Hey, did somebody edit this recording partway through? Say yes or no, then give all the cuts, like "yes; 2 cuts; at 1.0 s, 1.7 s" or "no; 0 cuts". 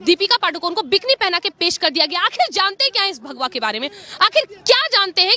no; 0 cuts